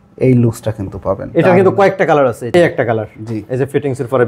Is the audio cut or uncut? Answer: cut